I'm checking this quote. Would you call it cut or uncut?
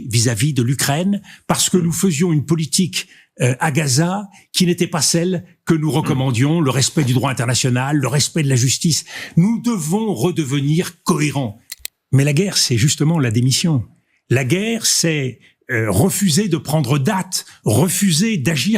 cut